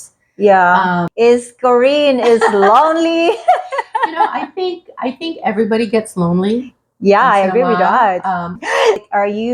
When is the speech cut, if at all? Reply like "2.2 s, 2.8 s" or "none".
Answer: 1.1 s, 8.6 s